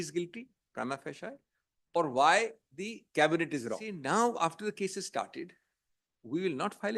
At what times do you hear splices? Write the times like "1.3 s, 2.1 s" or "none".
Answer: 3.9 s